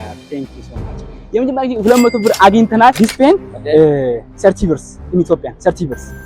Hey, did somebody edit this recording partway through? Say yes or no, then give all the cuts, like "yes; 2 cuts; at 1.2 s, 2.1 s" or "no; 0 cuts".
yes; 1 cut; at 3.0 s